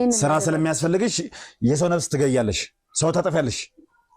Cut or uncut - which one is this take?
uncut